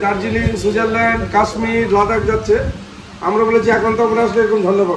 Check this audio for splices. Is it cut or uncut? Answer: uncut